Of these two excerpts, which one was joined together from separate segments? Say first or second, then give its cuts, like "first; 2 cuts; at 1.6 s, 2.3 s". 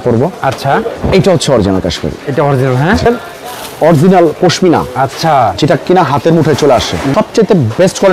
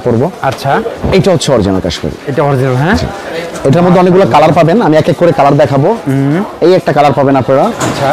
first; 2 cuts; at 3.1 s, 7.1 s